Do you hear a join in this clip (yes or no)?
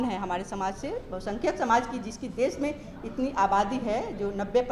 no